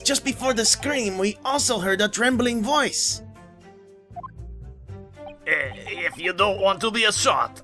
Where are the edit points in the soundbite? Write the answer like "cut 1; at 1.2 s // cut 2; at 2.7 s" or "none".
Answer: cut 1; at 2.7 s